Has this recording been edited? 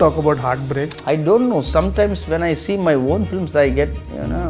yes; 1 cut; at 0.9 s

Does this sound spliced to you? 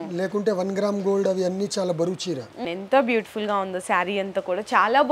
yes; 1 cut; at 2.6 s

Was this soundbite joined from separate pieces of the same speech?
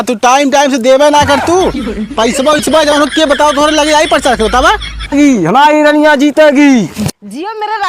yes; 1 cut; at 5.0 s

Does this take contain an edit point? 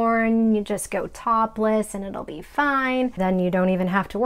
yes; 1 cut; at 3.2 s

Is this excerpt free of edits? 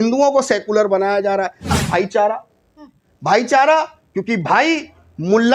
no; 1 cut; at 1.8 s

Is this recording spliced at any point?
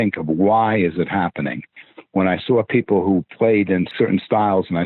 yes; 1 cut; at 3.9 s

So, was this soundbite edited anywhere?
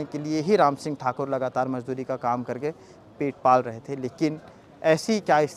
no; 0 cuts

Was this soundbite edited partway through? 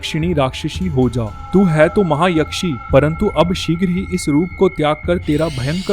no; 0 cuts

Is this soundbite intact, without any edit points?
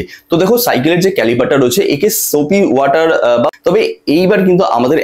no; 1 cut; at 3.5 s

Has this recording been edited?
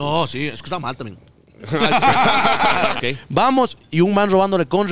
yes; 1 cut; at 3.0 s

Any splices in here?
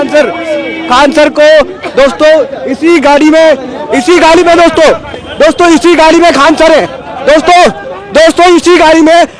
no; 0 cuts

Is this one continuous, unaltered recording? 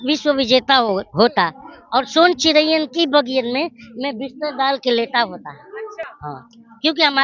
yes; 0 cuts

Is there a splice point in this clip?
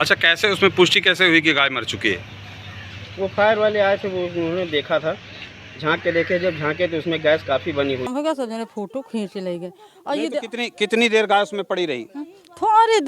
yes; 1 cut; at 8.1 s

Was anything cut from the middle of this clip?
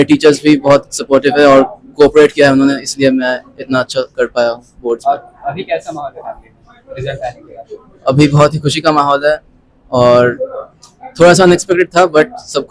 no; 0 cuts

